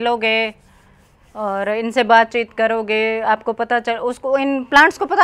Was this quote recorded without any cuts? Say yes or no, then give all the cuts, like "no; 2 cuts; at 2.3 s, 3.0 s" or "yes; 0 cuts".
yes; 0 cuts